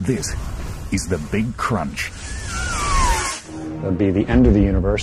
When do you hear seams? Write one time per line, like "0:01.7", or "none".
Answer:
0:01.0